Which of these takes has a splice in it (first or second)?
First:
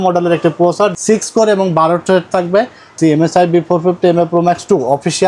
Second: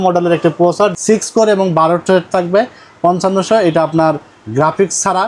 first